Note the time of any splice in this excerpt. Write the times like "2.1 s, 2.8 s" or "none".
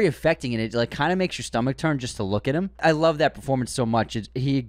2.8 s